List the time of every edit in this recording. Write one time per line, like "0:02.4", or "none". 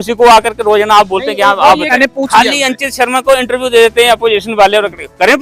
0:01.9